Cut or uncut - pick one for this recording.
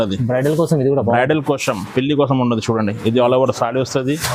uncut